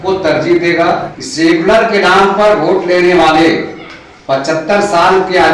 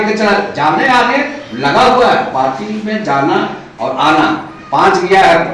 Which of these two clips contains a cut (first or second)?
first